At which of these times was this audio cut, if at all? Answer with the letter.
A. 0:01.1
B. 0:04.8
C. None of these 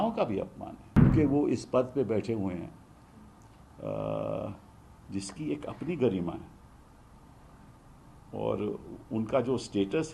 A